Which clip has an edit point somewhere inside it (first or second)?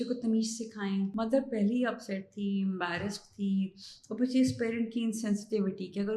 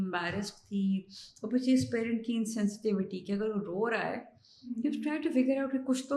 first